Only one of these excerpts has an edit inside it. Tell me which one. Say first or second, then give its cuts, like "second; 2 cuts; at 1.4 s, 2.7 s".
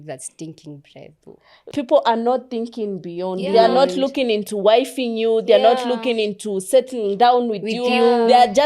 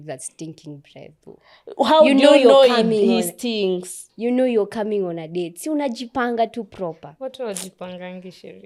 first; 1 cut; at 1.6 s